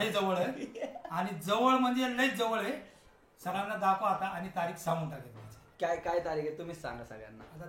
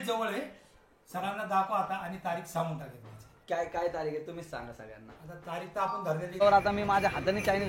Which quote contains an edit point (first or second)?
second